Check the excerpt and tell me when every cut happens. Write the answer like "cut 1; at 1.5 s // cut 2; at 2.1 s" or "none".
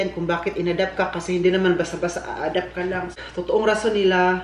cut 1; at 3.1 s